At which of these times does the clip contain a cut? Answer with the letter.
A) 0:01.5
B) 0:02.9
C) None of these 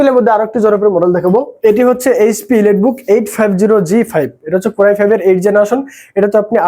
A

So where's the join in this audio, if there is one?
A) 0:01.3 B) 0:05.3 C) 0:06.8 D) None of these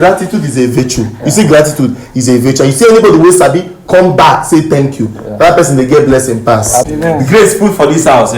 C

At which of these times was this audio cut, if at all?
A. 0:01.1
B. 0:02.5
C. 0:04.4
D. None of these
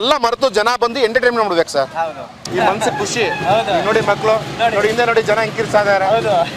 B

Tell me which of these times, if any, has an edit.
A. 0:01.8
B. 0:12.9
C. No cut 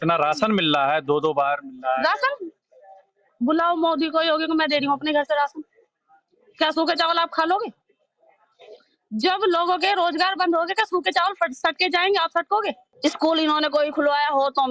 B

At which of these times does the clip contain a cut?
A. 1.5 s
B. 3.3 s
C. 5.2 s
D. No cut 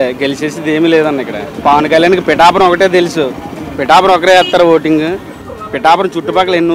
A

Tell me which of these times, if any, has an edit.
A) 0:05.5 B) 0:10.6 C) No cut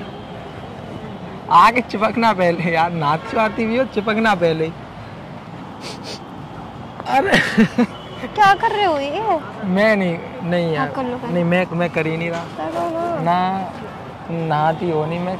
A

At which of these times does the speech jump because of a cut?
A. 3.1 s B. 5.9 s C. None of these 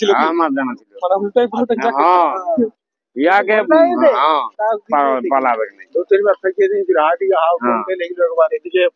C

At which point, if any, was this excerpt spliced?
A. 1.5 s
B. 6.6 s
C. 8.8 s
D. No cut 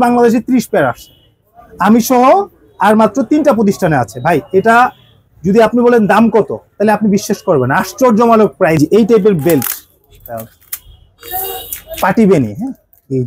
C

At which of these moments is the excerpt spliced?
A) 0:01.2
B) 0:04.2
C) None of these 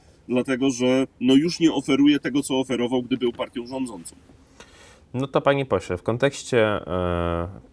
C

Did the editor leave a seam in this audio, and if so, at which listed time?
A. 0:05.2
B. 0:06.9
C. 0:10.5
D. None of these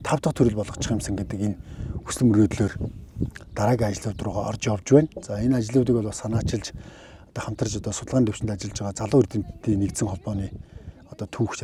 D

